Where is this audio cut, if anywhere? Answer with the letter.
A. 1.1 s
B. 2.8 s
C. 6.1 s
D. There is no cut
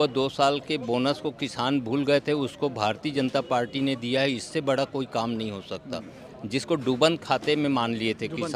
D